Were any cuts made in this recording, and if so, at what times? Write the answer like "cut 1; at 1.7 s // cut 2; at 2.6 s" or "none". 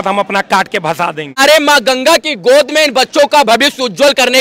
cut 1; at 1.4 s